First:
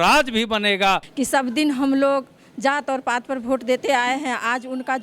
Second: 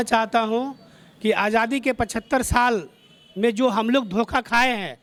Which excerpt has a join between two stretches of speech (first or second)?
first